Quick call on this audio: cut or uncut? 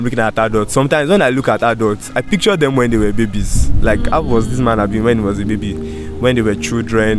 uncut